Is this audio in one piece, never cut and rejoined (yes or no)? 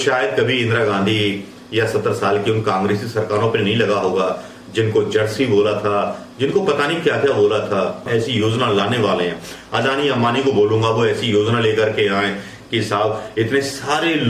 no